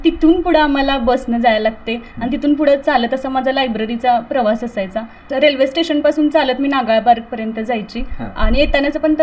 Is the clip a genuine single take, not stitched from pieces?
yes; 0 cuts

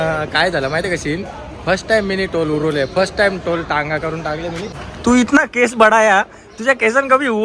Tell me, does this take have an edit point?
yes; 1 cut; at 4.8 s

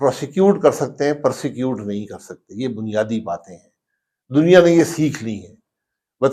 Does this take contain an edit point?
no; 0 cuts

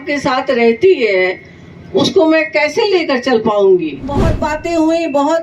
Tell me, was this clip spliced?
yes; 1 cut; at 4.2 s

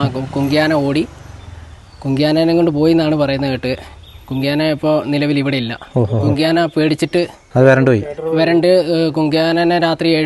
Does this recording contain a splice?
no; 0 cuts

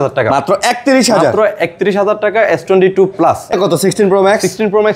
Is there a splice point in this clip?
yes; 1 cut; at 3.5 s

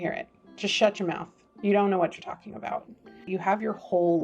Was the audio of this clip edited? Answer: yes; 1 cut; at 3.2 s

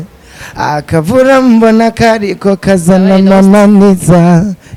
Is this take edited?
no; 0 cuts

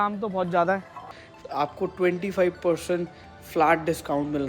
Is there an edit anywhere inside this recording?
yes; 1 cut; at 1.1 s

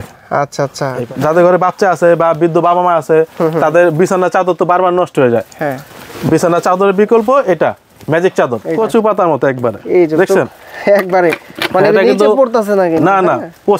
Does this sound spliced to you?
yes; 2 cuts; at 0.9 s, 8.6 s

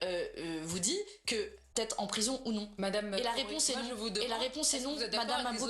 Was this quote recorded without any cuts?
no; 1 cut; at 1.6 s

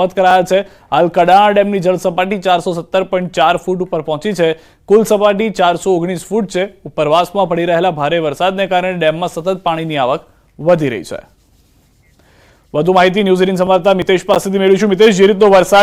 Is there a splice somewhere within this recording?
no; 0 cuts

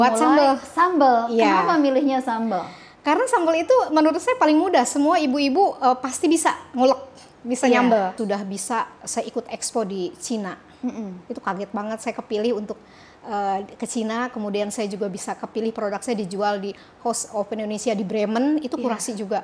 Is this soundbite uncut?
no; 1 cut; at 8.2 s

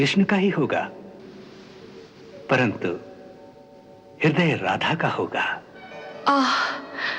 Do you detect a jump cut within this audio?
no; 0 cuts

